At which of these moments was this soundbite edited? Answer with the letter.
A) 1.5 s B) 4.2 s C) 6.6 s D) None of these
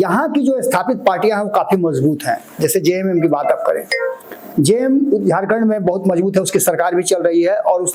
D